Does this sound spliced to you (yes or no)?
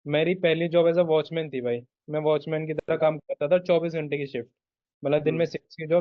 no